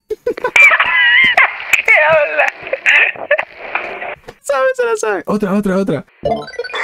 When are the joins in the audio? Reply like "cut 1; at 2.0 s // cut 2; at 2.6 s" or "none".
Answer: none